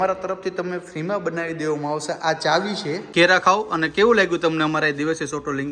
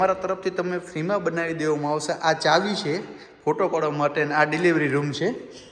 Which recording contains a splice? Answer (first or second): first